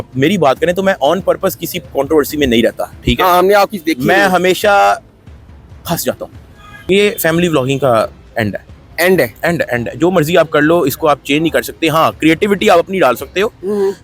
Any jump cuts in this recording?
yes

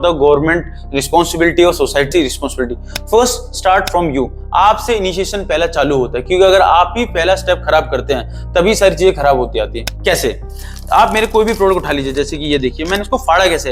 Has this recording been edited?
no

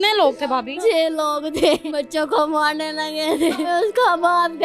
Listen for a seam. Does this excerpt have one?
yes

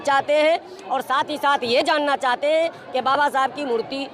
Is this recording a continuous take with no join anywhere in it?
yes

